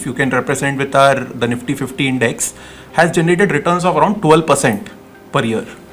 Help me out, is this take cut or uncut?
uncut